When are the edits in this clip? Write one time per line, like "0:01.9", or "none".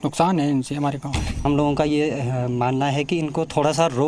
0:01.4